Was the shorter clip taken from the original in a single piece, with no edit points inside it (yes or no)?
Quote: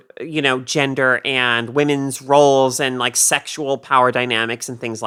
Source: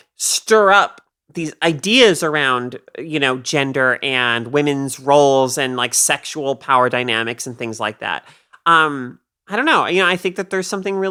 yes